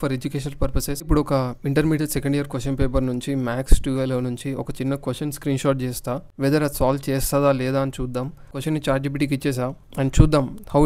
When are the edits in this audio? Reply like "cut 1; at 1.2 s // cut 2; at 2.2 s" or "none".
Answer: cut 1; at 1.1 s // cut 2; at 6.3 s // cut 3; at 8.6 s